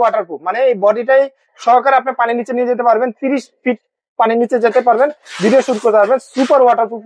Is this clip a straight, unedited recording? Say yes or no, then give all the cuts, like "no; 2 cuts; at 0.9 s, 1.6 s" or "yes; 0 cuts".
yes; 0 cuts